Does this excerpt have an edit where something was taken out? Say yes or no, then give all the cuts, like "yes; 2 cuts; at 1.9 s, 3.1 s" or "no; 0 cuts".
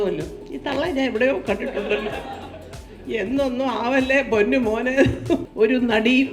yes; 1 cut; at 5.4 s